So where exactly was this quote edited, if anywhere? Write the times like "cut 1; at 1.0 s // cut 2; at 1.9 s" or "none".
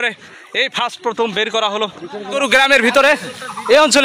cut 1; at 2.4 s

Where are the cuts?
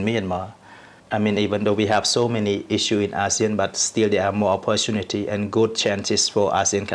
cut 1; at 0.9 s

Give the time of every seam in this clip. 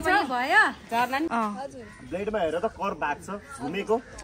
cut 1; at 1.3 s

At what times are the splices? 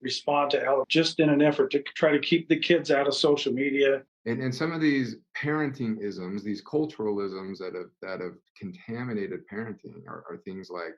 cut 1; at 0.9 s // cut 2; at 3.9 s

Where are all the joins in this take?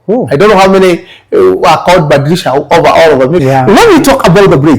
cut 1; at 3.4 s

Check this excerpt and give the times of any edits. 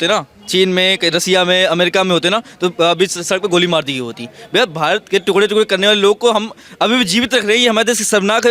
none

